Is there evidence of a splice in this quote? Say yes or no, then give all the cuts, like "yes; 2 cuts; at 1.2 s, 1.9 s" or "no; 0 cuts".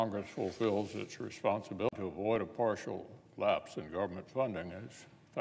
no; 0 cuts